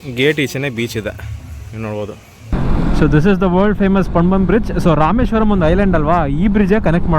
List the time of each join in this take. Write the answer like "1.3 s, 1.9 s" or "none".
2.6 s

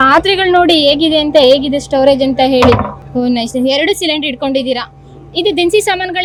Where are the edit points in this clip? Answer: none

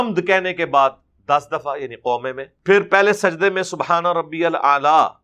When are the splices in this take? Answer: 2.5 s

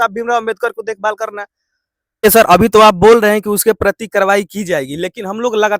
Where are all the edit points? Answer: 2.2 s

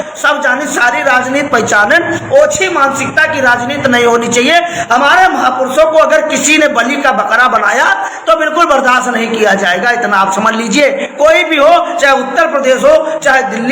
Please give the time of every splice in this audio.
none

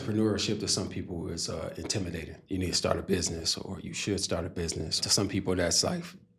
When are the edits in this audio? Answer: 2.4 s, 5.0 s

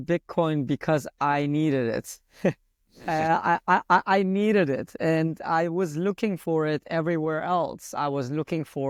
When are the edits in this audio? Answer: none

